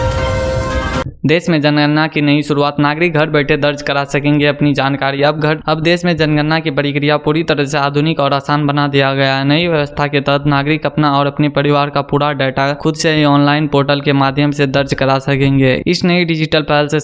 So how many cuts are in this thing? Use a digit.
1